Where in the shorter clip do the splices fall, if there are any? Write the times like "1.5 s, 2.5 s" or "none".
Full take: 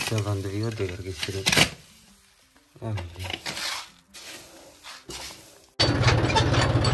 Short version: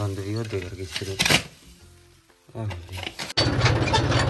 3.3 s